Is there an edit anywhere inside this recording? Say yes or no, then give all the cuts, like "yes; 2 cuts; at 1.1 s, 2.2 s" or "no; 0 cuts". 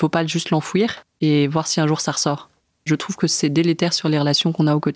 yes; 2 cuts; at 1.0 s, 2.8 s